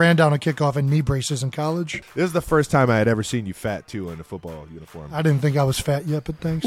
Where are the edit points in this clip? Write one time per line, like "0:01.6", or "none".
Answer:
0:02.0
0:05.1

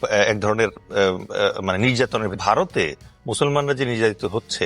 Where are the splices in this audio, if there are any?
0:02.4

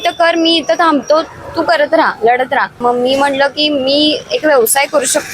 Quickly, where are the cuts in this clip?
0:02.8

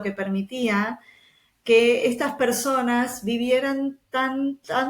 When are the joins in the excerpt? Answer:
none

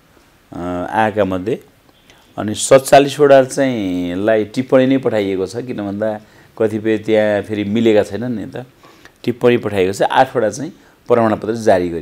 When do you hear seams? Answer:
none

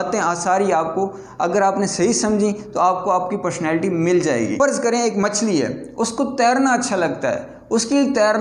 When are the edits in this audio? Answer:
0:04.5

